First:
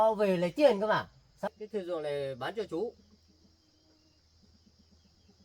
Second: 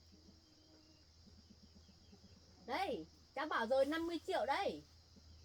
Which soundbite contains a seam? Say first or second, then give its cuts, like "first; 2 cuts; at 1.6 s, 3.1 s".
first; 1 cut; at 1.4 s